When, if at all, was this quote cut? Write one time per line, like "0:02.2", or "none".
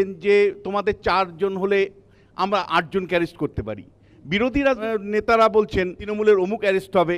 0:04.1
0:04.8
0:06.0